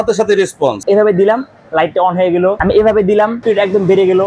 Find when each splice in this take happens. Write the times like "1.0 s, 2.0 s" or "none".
0.8 s, 2.6 s, 3.4 s